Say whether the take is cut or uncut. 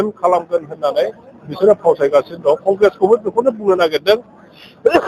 uncut